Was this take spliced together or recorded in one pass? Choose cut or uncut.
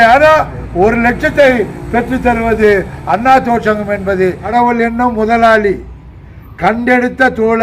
cut